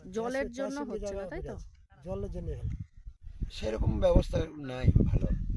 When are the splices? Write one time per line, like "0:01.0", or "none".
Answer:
0:03.1